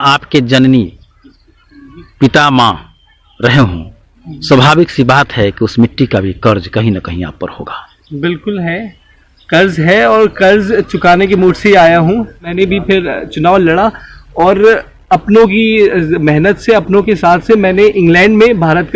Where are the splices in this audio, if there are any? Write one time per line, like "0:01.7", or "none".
0:12.5